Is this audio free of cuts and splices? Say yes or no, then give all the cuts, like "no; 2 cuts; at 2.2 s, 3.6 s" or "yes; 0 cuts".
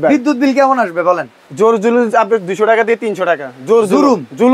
yes; 0 cuts